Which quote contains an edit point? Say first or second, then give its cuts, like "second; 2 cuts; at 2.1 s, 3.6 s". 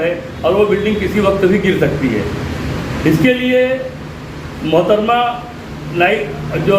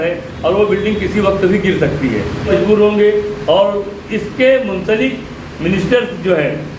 second; 1 cut; at 2.5 s